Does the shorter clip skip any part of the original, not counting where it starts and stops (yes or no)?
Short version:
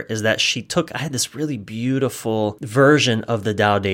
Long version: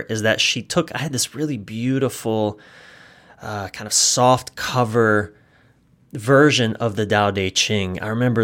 yes